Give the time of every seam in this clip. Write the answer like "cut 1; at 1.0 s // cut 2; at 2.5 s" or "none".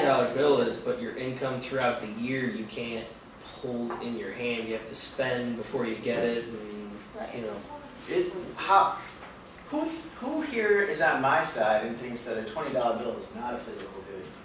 cut 1; at 8.5 s